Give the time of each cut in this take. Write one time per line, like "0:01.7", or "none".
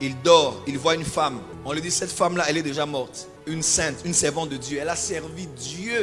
none